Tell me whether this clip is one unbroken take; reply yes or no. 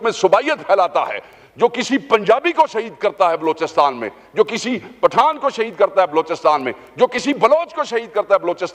yes